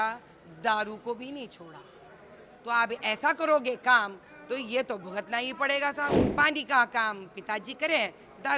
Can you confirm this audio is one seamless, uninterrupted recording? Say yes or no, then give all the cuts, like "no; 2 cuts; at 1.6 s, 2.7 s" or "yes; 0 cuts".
no; 1 cut; at 6.2 s